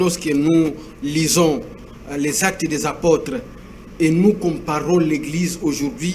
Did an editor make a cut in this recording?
no; 0 cuts

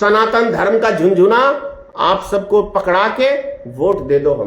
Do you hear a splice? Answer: no; 0 cuts

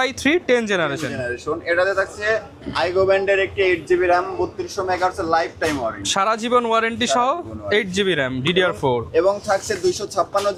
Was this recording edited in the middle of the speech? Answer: no; 0 cuts

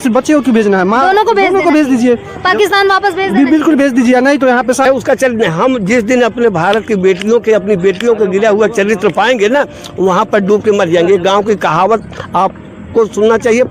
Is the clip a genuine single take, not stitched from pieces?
no; 1 cut; at 4.9 s

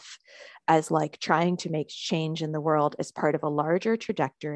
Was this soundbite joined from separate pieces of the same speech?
no; 0 cuts

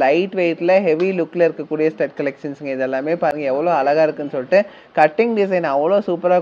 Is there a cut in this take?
no; 0 cuts

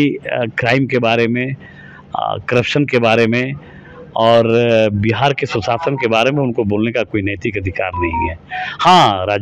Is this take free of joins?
yes; 0 cuts

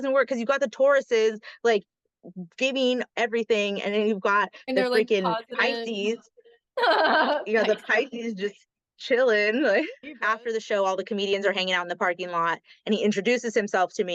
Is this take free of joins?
no; 1 cut; at 10.0 s

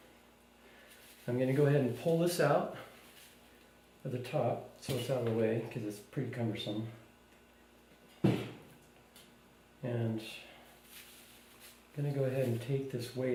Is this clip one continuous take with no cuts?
yes; 0 cuts

